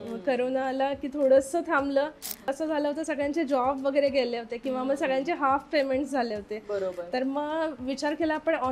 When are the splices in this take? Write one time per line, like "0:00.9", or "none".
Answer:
0:02.5

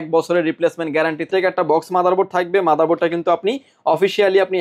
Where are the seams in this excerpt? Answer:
0:01.3

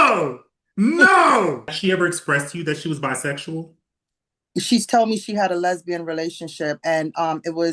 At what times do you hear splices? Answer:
0:01.7

